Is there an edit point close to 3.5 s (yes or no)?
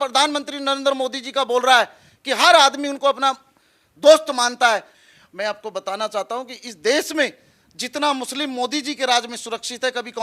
no